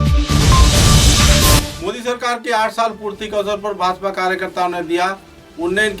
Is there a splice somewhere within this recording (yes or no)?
yes